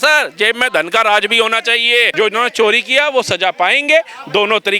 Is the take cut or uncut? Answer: cut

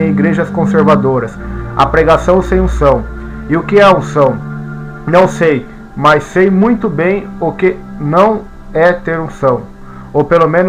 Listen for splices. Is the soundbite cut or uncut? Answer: cut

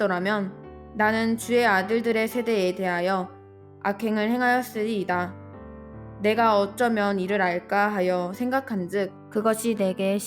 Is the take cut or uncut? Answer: cut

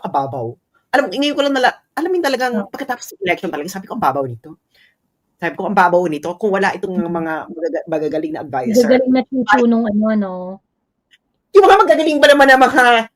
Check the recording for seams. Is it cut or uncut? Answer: uncut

